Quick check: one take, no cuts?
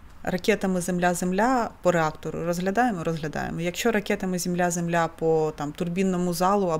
yes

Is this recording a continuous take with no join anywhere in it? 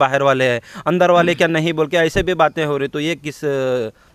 yes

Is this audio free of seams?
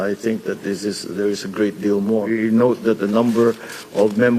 no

